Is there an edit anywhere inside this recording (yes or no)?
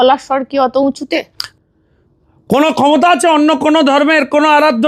yes